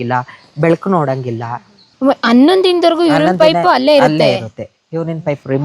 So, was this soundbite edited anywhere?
yes; 1 cut; at 1.8 s

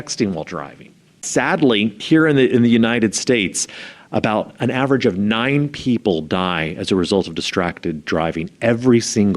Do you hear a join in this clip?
yes; 2 cuts; at 1.2 s, 2.0 s

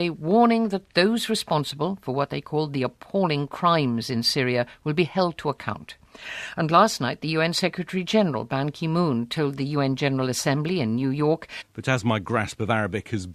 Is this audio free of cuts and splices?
yes; 0 cuts

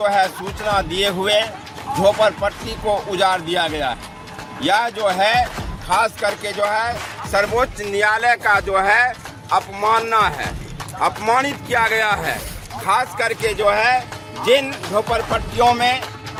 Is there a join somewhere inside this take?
no; 0 cuts

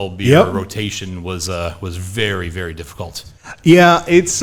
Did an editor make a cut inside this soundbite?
no; 0 cuts

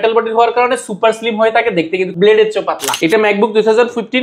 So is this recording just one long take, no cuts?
no; 2 cuts; at 2.1 s, 2.9 s

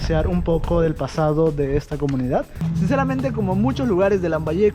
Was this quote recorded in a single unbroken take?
no; 1 cut; at 2.5 s

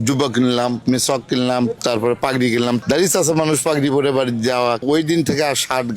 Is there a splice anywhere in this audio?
yes; 2 cuts; at 2.8 s, 4.8 s

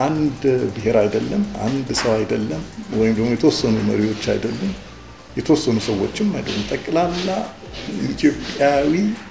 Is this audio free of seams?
yes; 0 cuts

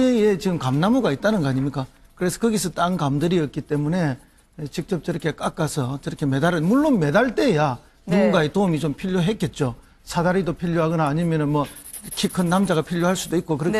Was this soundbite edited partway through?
yes; 1 cut; at 9.0 s

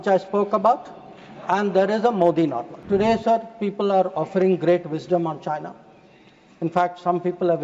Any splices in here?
yes; 1 cut; at 2.7 s

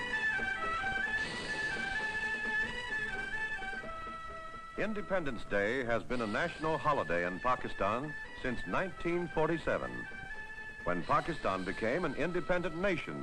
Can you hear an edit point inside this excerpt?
yes; 1 cut; at 1.1 s

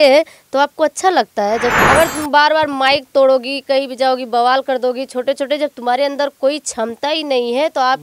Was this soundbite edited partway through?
yes; 1 cut; at 1.8 s

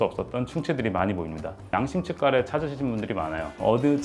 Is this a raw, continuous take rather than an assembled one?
no; 1 cut; at 1.7 s

